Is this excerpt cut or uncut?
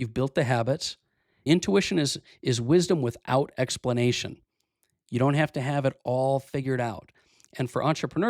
cut